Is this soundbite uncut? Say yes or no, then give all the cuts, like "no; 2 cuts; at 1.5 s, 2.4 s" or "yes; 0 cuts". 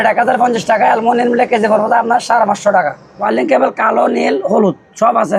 no; 1 cut; at 3.1 s